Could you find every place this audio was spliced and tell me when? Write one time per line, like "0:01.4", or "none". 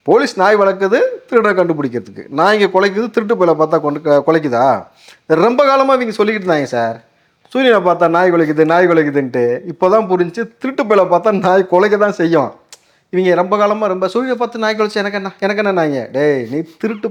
none